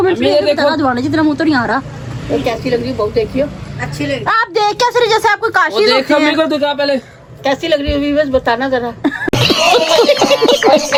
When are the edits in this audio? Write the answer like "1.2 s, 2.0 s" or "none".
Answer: none